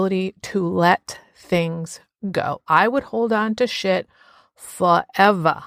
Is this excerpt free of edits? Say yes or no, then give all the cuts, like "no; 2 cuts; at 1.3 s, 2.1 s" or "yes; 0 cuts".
yes; 0 cuts